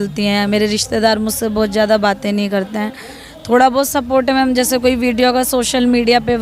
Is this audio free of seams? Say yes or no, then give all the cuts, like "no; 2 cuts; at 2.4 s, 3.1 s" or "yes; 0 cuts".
yes; 0 cuts